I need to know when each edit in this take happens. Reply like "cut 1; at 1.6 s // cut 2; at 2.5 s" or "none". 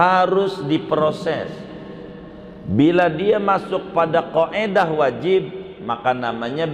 none